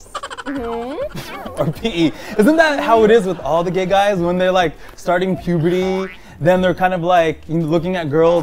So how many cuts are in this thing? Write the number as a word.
zero